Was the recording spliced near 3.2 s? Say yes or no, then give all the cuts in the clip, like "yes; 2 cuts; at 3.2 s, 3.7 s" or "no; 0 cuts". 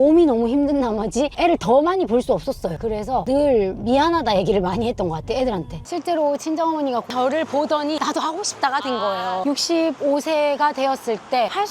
yes; 4 cuts; at 3.2 s, 5.8 s, 7.1 s, 9.4 s